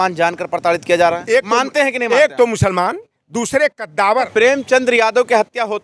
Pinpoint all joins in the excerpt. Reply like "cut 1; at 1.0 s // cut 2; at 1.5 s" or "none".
cut 1; at 1.2 s // cut 2; at 4.3 s